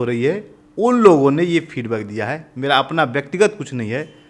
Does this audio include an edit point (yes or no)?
no